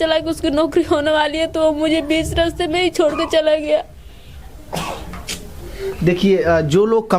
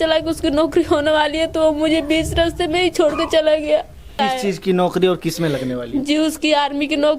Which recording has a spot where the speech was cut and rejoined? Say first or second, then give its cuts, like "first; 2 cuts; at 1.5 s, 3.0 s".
second; 1 cut; at 4.2 s